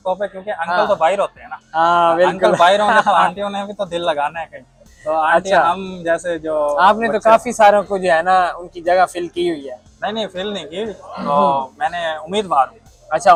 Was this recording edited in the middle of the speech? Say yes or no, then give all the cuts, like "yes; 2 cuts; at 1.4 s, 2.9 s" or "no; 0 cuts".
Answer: no; 0 cuts